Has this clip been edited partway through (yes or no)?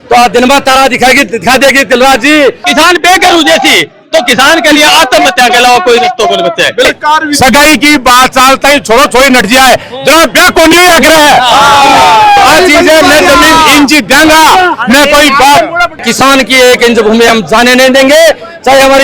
yes